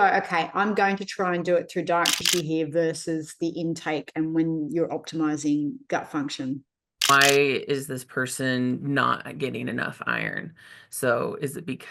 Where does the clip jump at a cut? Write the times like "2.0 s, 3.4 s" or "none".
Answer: 2.2 s, 7.1 s